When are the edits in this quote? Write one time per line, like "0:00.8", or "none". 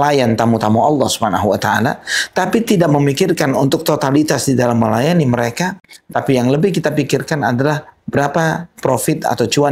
none